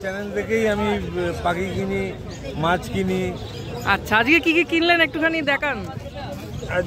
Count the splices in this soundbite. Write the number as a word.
zero